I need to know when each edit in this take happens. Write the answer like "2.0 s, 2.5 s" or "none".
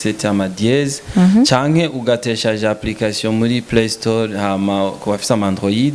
none

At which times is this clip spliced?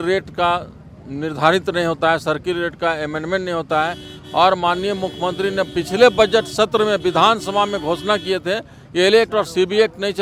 none

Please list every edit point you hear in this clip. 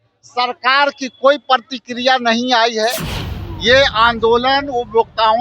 3.3 s

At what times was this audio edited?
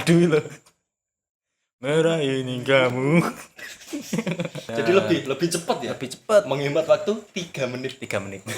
4.6 s

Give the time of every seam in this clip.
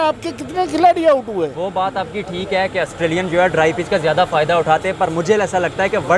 none

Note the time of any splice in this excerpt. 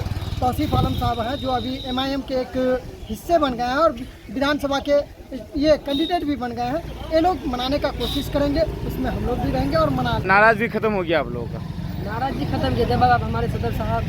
10.2 s

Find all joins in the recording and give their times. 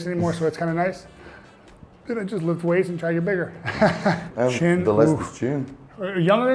4.3 s

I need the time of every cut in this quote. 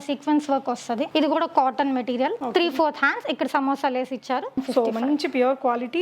1.1 s, 2.4 s, 4.6 s

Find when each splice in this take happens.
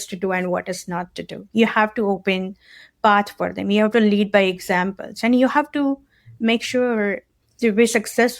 7.3 s

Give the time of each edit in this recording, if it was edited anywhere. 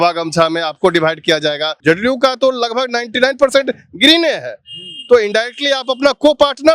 1.7 s

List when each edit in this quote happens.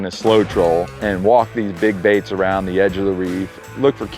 1.0 s

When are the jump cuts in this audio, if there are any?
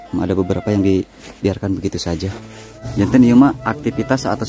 2.8 s

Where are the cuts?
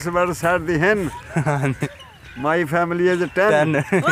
none

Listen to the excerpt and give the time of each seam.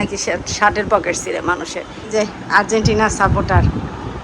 2.1 s

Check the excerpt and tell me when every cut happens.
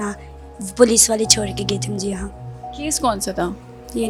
none

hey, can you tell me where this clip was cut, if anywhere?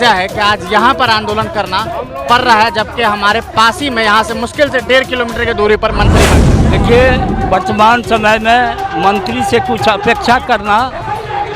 6.3 s

